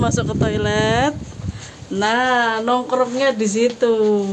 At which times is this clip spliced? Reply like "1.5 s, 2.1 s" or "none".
none